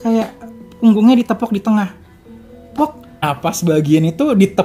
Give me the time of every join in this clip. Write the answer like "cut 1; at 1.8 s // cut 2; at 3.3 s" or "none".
cut 1; at 3.2 s